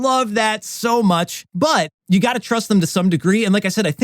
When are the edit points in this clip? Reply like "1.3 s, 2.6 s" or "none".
1.7 s

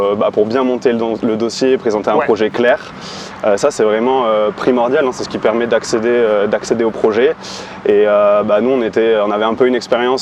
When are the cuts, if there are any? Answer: none

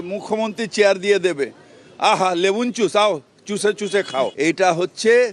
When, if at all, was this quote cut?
4.3 s

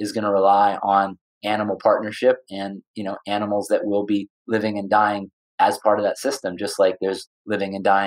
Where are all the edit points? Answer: none

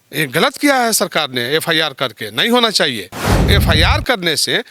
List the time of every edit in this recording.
3.4 s

